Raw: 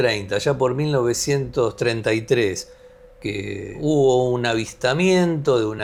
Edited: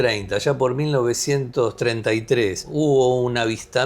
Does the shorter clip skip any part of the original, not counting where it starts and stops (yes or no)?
yes